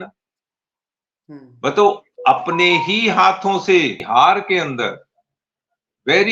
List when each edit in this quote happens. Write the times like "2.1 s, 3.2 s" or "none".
4.0 s